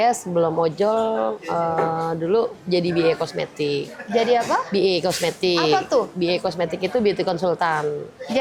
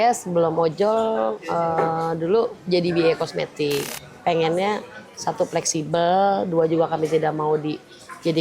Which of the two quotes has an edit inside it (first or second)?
second